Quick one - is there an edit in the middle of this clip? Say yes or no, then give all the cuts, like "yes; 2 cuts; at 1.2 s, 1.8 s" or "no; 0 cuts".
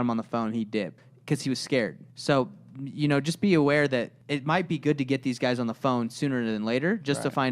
yes; 3 cuts; at 1.0 s, 2.1 s, 4.2 s